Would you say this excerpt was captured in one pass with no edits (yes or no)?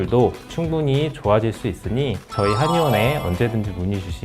no